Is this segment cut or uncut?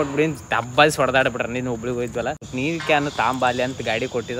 uncut